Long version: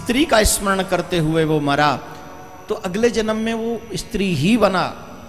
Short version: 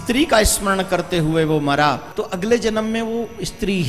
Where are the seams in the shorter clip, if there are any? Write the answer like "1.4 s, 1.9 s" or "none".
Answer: 2.1 s